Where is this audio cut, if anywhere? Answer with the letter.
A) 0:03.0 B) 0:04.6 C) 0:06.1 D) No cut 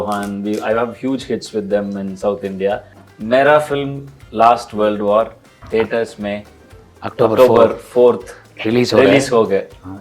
A